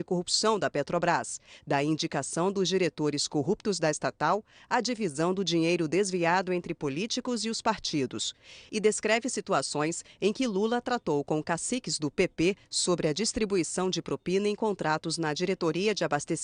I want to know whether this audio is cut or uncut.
uncut